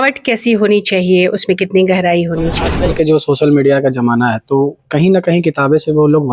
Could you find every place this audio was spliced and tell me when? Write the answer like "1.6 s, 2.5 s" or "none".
2.7 s